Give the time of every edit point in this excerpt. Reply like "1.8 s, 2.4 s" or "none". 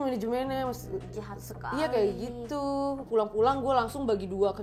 3.1 s